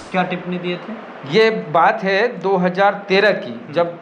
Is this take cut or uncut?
uncut